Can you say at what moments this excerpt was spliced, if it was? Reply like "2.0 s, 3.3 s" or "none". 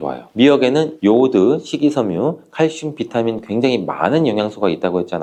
none